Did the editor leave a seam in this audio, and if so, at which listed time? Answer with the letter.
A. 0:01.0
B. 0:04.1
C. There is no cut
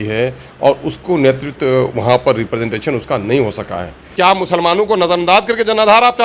B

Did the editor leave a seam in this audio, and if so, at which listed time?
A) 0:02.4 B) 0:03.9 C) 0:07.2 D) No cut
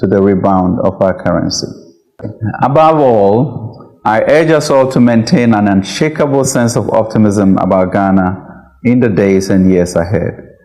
A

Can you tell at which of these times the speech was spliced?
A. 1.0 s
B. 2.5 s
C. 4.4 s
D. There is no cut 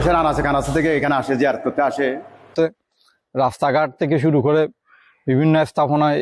B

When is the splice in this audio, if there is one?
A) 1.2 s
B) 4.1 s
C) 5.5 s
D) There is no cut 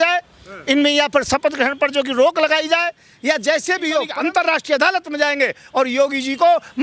B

